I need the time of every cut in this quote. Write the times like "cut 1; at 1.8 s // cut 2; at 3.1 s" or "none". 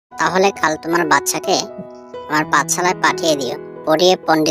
none